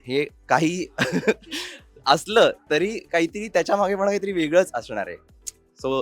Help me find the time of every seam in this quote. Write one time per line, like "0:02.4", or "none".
none

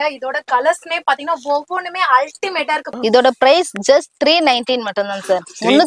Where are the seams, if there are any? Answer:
0:02.9

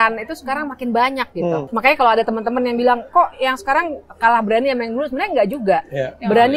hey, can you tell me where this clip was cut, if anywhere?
0:01.7

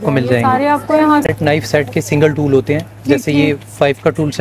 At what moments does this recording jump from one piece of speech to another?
0:01.3

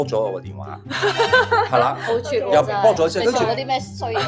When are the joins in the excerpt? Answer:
none

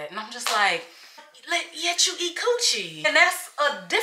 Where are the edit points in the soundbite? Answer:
0:01.3
0:03.0

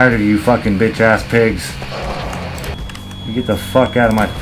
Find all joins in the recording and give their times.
0:02.7

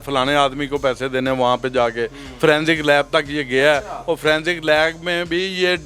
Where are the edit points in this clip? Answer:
none

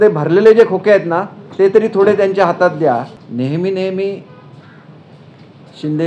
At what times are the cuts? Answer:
0:03.2

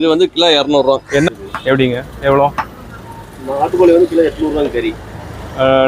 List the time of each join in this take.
0:01.3

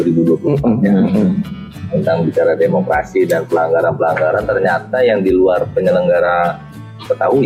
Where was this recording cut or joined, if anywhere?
none

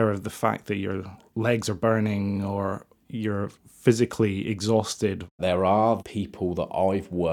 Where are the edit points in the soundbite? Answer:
0:05.4
0:06.0

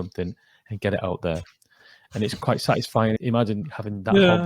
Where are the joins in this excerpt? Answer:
0:03.2

